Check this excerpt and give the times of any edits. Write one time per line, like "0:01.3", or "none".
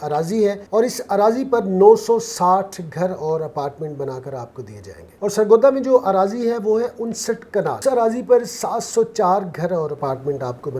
0:07.8